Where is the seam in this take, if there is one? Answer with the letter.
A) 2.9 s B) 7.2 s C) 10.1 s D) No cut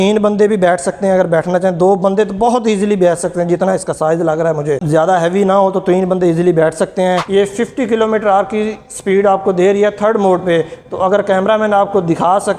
B